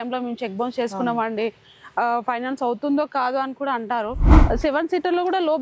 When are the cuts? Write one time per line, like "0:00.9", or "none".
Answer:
0:04.3